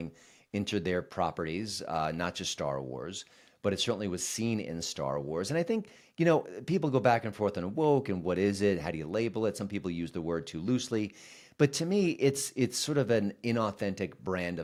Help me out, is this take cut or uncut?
uncut